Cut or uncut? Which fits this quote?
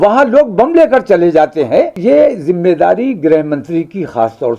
cut